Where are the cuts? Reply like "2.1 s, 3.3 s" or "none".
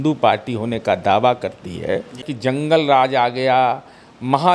2.3 s